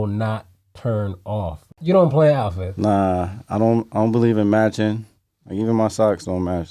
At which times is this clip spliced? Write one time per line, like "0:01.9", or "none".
0:01.7